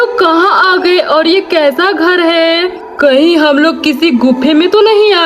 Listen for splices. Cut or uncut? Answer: cut